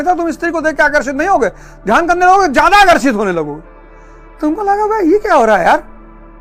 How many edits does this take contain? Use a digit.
0